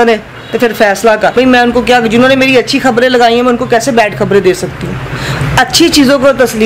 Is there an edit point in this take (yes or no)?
yes